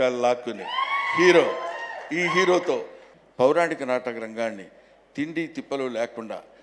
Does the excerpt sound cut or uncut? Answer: cut